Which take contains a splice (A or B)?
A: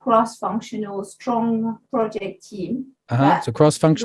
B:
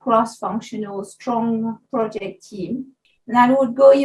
B